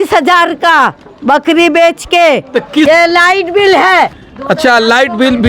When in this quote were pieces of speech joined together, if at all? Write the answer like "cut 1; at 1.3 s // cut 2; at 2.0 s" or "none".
cut 1; at 2.9 s